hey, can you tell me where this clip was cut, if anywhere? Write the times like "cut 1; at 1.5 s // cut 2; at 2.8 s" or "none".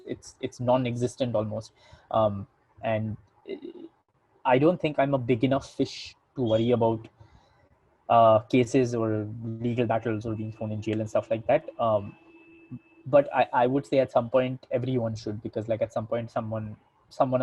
none